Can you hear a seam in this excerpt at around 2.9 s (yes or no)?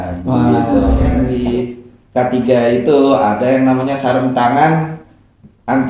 no